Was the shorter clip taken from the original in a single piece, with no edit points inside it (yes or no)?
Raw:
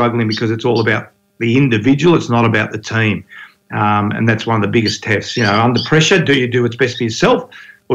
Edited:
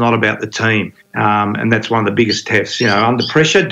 no